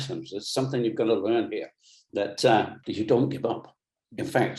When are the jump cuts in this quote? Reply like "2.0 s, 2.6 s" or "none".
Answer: 2.8 s